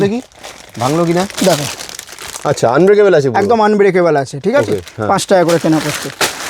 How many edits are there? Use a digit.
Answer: 0